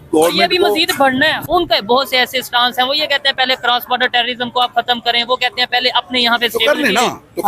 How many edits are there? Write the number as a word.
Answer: one